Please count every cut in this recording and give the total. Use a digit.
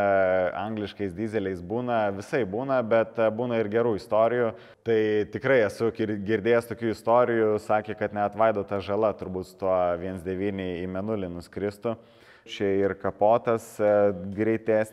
2